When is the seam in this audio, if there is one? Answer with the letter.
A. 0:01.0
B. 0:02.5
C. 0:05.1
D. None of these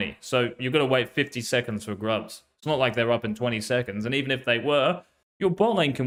D